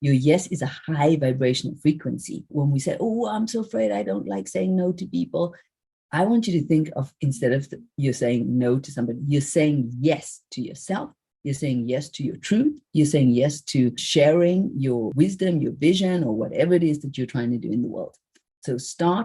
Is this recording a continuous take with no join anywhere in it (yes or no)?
yes